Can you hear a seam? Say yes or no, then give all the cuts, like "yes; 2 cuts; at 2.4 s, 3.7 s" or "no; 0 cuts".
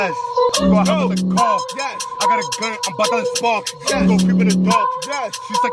no; 0 cuts